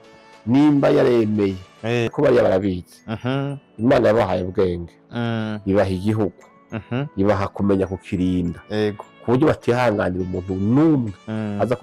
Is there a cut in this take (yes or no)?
yes